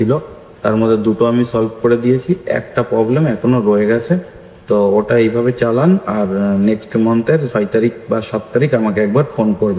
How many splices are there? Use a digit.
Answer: 0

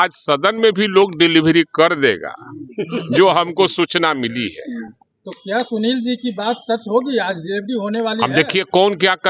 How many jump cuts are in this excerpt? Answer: 0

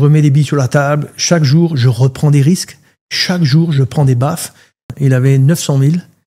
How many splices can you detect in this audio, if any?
1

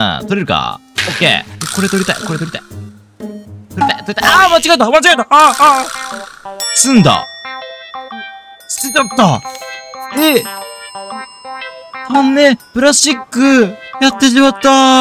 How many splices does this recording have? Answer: 0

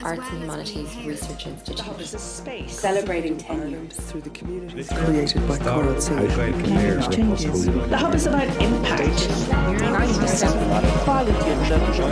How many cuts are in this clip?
1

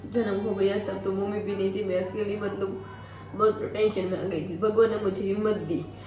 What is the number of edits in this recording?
0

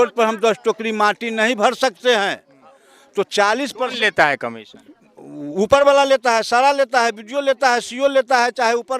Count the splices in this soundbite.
0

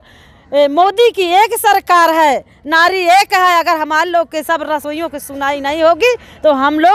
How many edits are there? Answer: 0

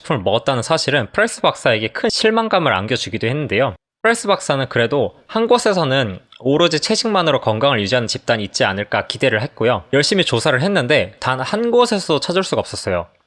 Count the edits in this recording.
2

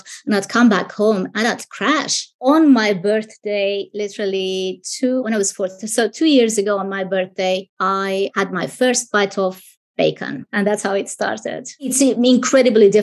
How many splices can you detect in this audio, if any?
4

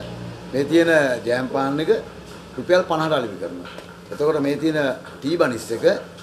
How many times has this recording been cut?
0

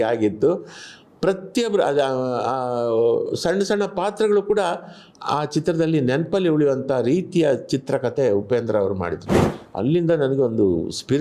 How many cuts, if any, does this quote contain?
1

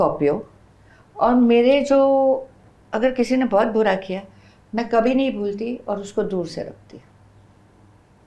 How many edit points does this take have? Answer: 0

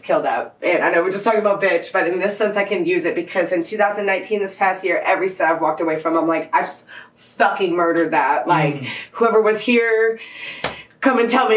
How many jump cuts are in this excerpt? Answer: 0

